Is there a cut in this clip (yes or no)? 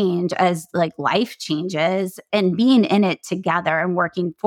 yes